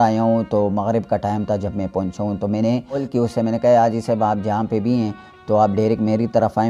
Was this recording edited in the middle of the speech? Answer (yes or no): yes